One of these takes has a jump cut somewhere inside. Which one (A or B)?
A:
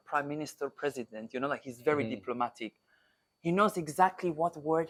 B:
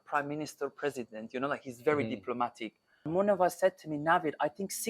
B